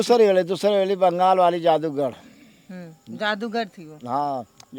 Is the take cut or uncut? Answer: uncut